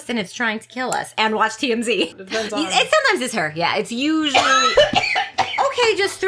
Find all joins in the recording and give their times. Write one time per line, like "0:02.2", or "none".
0:02.1